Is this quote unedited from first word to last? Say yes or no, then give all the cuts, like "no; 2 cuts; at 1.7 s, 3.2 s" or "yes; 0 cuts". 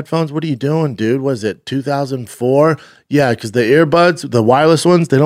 yes; 0 cuts